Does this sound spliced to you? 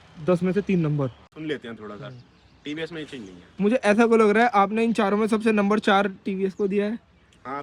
yes; 1 cut; at 1.3 s

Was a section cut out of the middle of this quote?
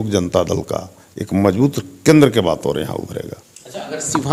no; 0 cuts

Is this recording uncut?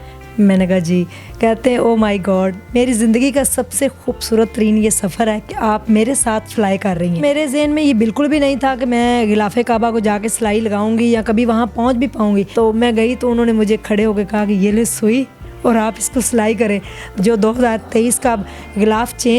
no; 3 cuts; at 7.2 s, 12.5 s, 17.1 s

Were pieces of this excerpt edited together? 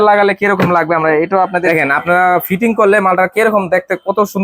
yes; 1 cut; at 1.6 s

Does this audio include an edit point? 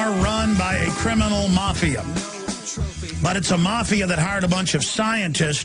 no; 0 cuts

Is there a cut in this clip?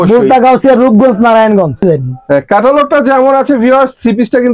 yes; 1 cut; at 1.8 s

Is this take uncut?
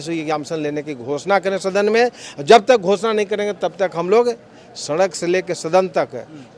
yes; 0 cuts

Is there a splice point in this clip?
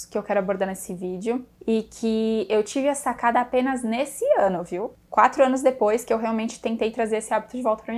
no; 0 cuts

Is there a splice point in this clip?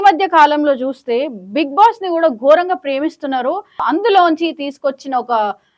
yes; 1 cut; at 3.8 s

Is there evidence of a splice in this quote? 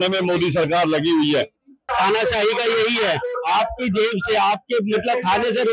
yes; 1 cut; at 1.9 s

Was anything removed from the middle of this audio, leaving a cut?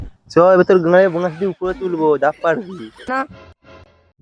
yes; 1 cut; at 3.1 s

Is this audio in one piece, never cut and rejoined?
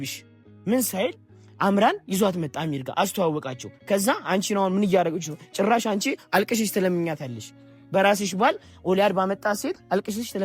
yes; 0 cuts

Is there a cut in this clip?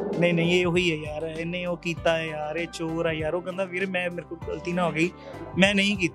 no; 0 cuts

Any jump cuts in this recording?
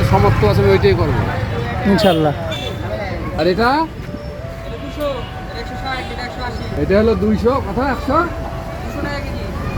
no; 0 cuts

